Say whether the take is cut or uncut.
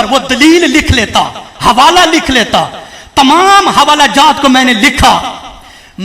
uncut